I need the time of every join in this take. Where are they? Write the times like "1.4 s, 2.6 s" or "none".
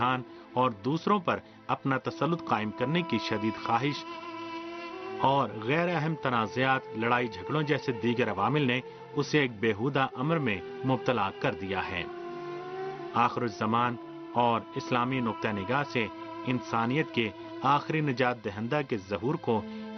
none